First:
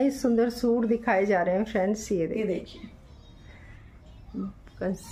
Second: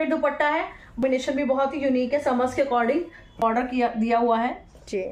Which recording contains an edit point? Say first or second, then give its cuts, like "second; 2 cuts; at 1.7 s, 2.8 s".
second; 2 cuts; at 1.0 s, 3.4 s